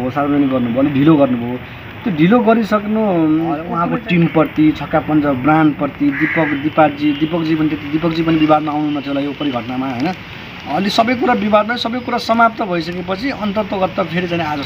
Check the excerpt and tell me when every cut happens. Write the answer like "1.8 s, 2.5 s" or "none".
3.7 s